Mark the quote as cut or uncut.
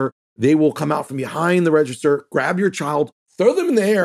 uncut